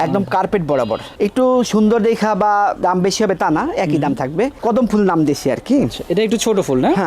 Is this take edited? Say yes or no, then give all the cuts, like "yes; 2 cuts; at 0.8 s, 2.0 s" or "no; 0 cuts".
yes; 2 cuts; at 1.1 s, 4.6 s